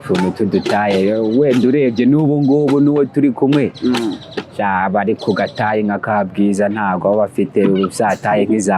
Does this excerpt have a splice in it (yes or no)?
no